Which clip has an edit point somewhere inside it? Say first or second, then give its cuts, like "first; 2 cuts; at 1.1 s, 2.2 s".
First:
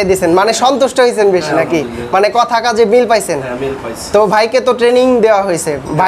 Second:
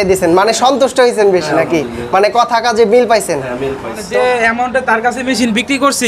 second; 1 cut; at 4.0 s